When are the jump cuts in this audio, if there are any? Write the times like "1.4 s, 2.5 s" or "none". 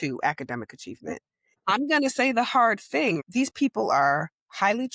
1.5 s, 3.2 s